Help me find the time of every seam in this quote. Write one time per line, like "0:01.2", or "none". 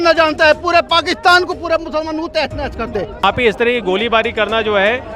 0:03.2